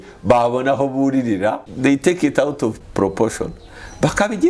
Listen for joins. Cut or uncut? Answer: cut